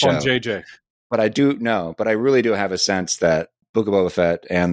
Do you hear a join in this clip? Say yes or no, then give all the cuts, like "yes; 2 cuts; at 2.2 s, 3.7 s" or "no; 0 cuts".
yes; 1 cut; at 3.6 s